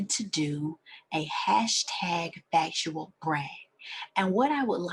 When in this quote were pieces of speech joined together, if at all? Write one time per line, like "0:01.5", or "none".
none